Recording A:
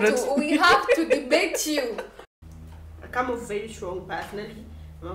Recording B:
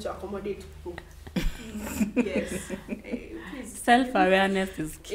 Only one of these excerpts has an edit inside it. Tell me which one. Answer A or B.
A